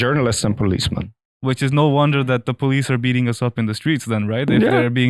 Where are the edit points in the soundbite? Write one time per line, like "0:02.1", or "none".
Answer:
0:01.3